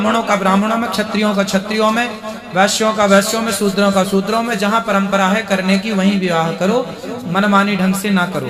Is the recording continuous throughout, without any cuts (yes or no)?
yes